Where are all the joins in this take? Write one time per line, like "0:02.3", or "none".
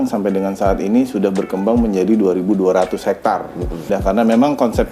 0:03.9